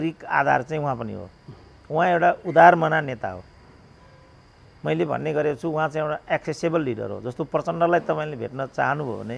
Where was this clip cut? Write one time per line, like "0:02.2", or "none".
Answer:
none